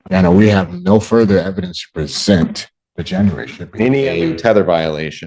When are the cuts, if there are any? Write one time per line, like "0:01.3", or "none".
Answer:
0:04.1